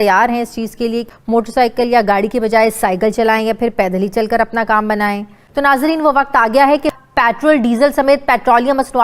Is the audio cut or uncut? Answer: cut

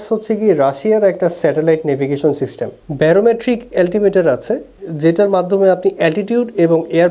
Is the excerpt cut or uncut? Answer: uncut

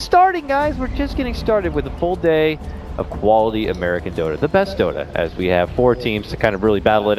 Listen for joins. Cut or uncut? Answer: uncut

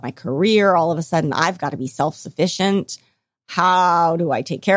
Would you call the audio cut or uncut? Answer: uncut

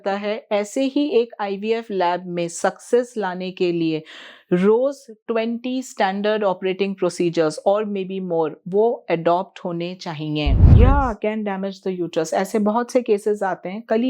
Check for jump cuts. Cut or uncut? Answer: cut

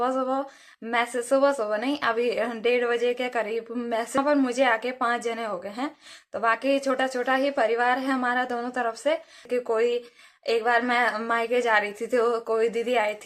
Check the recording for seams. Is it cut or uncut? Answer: cut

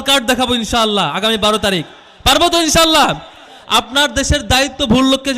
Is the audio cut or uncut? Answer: cut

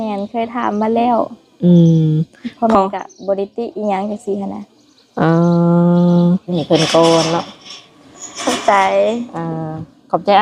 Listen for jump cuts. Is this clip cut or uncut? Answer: cut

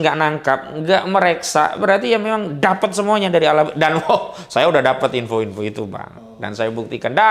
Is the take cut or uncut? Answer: uncut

